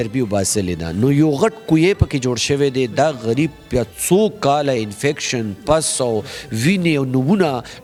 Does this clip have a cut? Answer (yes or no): no